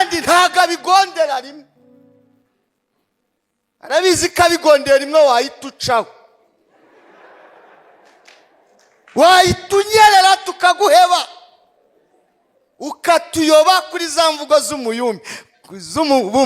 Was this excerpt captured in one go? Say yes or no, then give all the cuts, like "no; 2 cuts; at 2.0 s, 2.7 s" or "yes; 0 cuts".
yes; 0 cuts